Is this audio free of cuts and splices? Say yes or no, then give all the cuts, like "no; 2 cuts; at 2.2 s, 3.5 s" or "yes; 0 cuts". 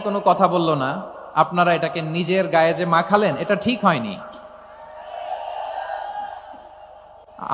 yes; 0 cuts